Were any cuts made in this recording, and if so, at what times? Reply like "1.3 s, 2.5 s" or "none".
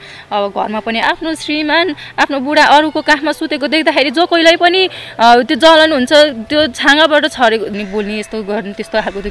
1.0 s, 7.8 s